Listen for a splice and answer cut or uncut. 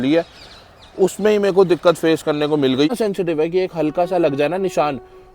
cut